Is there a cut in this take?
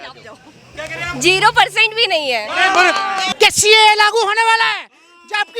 yes; 1 cut; at 3.3 s

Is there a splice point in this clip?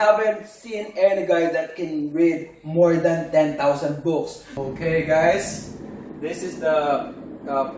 yes; 1 cut; at 4.5 s

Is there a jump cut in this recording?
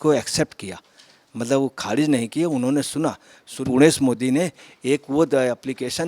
yes; 1 cut; at 3.6 s

